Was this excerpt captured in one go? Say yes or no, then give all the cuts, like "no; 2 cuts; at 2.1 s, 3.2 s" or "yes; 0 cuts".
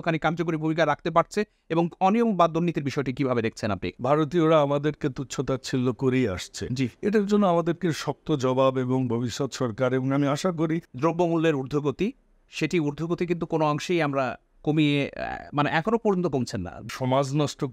no; 3 cuts; at 3.9 s, 10.9 s, 16.9 s